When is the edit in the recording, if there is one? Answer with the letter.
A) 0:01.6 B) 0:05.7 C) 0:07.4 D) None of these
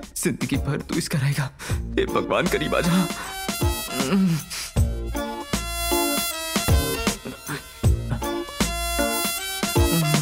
D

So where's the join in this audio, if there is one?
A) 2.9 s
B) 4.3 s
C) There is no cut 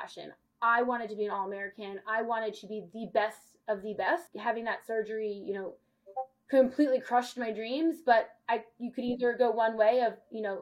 B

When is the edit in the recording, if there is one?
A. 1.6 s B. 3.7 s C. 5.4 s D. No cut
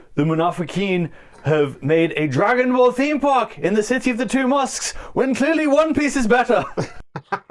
D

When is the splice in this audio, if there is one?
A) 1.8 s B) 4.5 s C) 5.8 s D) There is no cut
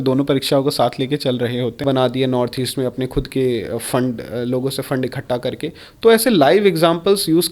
A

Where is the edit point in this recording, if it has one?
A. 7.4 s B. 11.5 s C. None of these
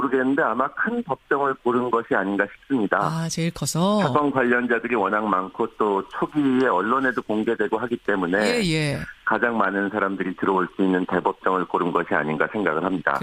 A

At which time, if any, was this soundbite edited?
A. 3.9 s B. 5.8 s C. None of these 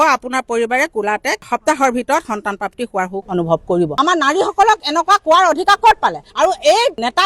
A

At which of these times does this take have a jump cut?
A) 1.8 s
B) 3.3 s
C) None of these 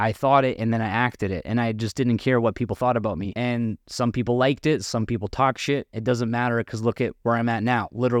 B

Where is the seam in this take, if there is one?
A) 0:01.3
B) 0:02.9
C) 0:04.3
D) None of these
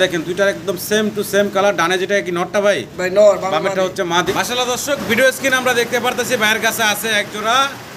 C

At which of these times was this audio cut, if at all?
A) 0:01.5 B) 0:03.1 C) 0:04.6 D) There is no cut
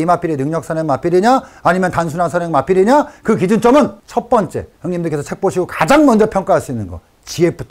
D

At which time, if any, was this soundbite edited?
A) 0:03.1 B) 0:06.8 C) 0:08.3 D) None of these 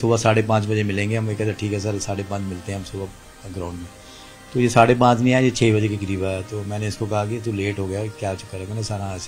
D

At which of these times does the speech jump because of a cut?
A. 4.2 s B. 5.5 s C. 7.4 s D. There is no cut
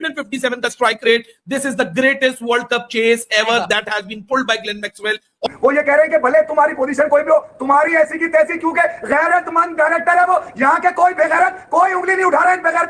B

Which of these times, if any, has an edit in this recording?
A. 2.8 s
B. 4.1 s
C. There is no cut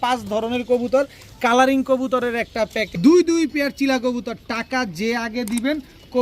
A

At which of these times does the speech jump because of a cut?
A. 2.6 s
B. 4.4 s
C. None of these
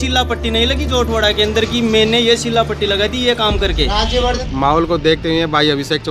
B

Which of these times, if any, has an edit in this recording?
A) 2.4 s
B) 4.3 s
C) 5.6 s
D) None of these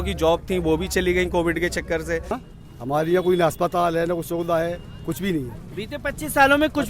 A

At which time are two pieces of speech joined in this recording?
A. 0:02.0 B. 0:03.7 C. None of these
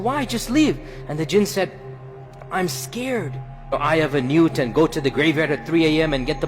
B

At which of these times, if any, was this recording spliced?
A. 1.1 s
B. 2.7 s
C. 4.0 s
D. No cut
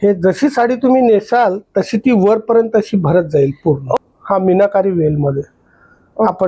C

